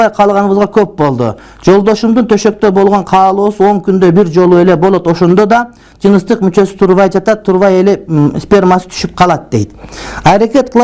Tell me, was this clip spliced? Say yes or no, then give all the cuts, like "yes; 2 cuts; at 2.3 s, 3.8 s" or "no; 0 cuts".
no; 0 cuts